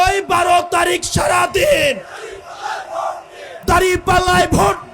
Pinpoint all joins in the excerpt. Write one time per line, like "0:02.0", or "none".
0:03.4